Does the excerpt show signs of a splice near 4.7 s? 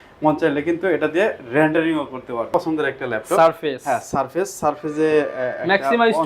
no; 1 cut; at 2.5 s

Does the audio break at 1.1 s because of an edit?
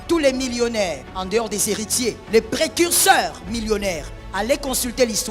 yes; 2 cuts; at 1.1 s, 2.2 s

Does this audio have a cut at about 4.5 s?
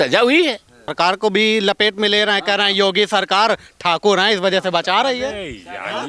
no; 1 cut; at 0.9 s

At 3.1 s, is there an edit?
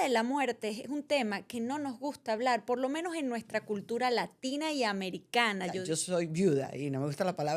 no; 1 cut; at 5.8 s

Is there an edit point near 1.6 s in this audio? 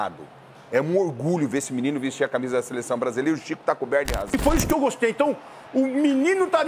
no; 1 cut; at 4.3 s

